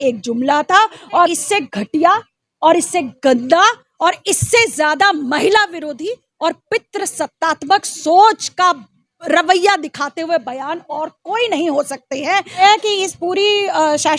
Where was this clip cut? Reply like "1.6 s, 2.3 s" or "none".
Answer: 1.3 s, 12.6 s